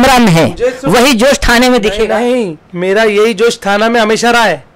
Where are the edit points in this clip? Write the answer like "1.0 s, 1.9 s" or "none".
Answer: 2.6 s